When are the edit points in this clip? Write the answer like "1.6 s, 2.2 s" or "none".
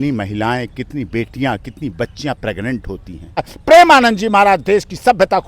3.5 s